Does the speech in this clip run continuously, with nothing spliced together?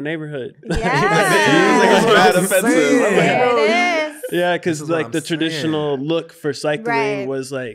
yes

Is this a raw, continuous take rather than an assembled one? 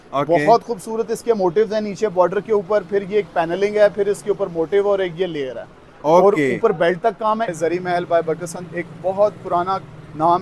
no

